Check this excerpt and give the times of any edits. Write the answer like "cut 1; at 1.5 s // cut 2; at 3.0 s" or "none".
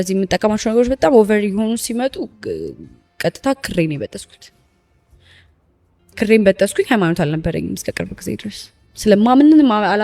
none